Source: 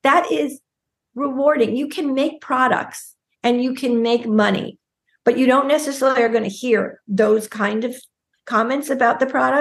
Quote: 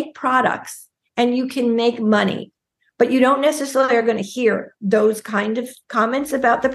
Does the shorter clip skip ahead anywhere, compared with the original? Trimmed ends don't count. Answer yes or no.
yes